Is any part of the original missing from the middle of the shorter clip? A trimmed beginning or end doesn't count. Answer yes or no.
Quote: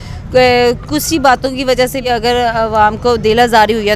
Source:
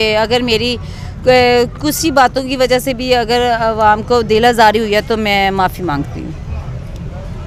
yes